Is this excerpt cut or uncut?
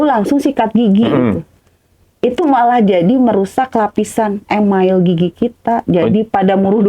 uncut